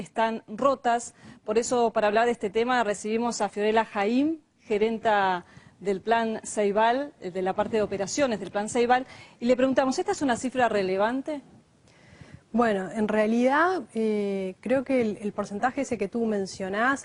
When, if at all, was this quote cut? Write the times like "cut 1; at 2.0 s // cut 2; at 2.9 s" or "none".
cut 1; at 10.7 s